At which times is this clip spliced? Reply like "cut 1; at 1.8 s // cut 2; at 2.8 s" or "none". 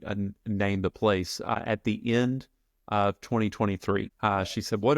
cut 1; at 1.6 s // cut 2; at 4.1 s